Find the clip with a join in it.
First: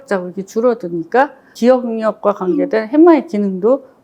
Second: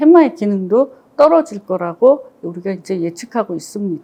first; 1 cut; at 1.5 s

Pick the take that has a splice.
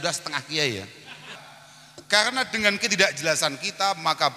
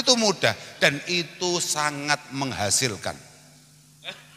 first; 1 cut; at 1.4 s

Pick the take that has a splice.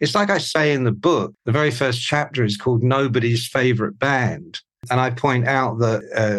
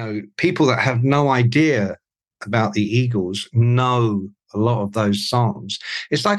first; 2 cuts; at 1.3 s, 4.8 s

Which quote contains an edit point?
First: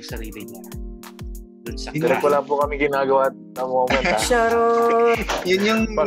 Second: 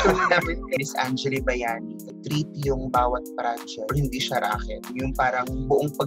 second; 4 cuts; at 0.8 s, 2.1 s, 3.9 s, 4.9 s

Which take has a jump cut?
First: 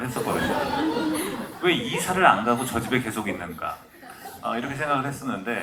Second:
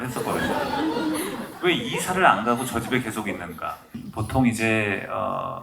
second; 1 cut; at 4.0 s

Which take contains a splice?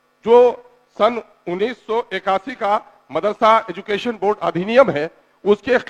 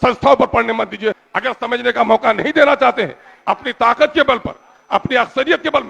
second; 1 cut; at 1.2 s

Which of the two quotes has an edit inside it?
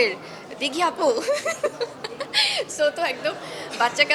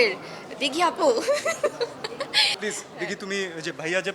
second; 1 cut; at 2.5 s

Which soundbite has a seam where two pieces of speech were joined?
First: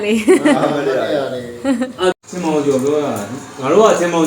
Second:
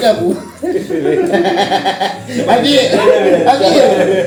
first; 1 cut; at 2.3 s

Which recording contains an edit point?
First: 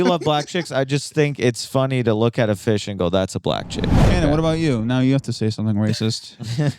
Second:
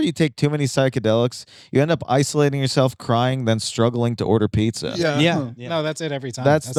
first; 1 cut; at 4.0 s

